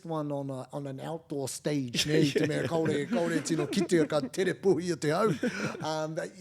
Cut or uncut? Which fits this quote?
uncut